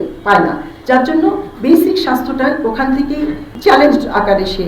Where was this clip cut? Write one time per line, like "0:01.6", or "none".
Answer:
0:03.5

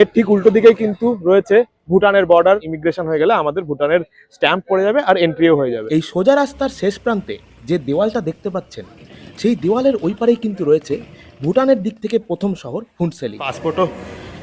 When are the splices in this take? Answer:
0:02.7
0:05.8
0:13.5

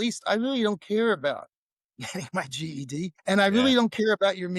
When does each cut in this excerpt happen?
0:03.2

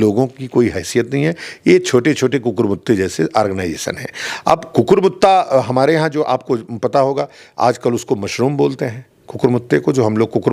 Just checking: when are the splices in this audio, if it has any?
none

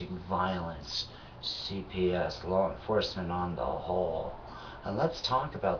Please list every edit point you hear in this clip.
none

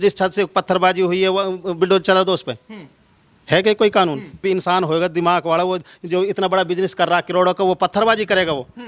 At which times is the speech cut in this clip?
0:04.4

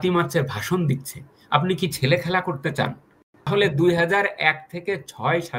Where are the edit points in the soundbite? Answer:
0:03.5

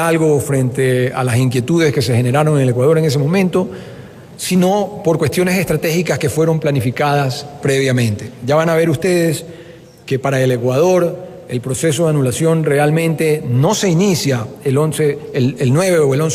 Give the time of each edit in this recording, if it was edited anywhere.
0:12.1

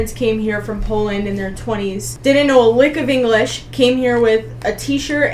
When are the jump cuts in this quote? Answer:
0:02.1

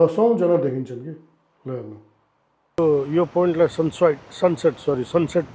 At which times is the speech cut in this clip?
0:02.8

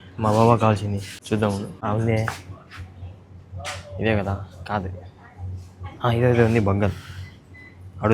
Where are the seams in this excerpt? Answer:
0:01.1
0:01.7

